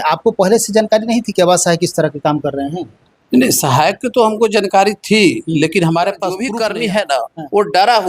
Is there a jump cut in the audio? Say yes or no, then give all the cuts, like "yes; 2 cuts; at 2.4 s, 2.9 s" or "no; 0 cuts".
yes; 1 cut; at 6.5 s